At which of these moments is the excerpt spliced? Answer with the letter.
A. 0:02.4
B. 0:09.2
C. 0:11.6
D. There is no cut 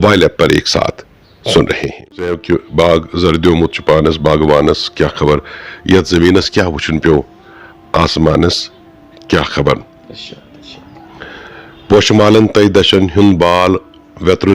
A